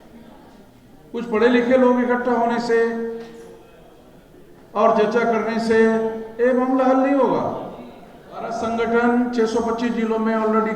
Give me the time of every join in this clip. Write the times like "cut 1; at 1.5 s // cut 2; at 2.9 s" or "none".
cut 1; at 8.5 s